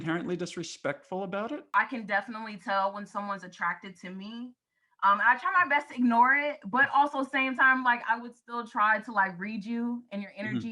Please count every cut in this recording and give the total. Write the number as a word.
one